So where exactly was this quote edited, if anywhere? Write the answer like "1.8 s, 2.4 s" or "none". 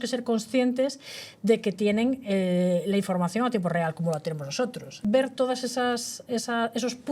4.9 s